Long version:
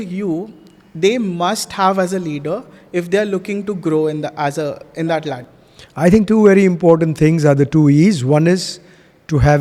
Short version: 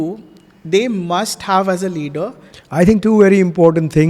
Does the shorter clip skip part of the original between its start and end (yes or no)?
yes